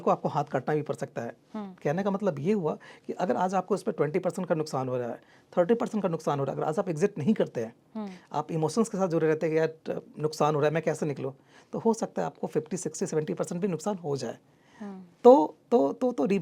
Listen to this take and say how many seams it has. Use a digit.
0